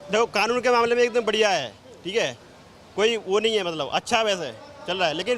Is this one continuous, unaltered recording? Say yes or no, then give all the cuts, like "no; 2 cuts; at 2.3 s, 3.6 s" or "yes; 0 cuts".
yes; 0 cuts